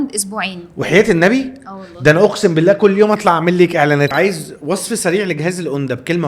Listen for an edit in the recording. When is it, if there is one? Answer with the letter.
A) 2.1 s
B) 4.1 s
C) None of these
B